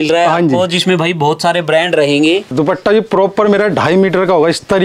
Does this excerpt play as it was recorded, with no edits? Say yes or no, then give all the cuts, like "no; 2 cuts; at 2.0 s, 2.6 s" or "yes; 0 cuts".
yes; 0 cuts